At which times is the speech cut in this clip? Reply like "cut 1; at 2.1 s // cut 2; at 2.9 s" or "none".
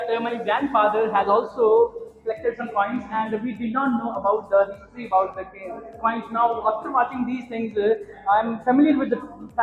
none